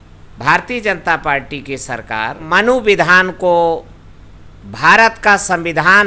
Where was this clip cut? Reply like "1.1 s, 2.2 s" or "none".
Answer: 2.4 s